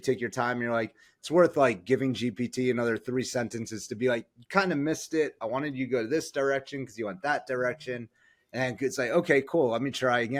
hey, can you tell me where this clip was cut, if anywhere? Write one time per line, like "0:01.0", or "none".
none